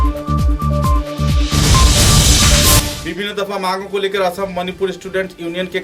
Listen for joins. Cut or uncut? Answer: uncut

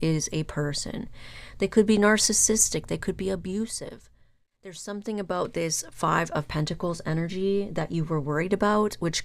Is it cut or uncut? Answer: cut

